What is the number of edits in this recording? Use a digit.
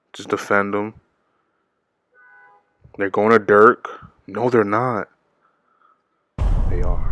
0